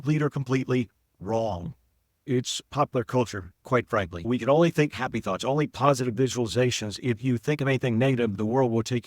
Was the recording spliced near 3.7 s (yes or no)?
no